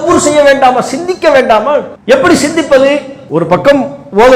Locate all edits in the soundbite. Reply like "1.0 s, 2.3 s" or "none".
1.9 s, 3.2 s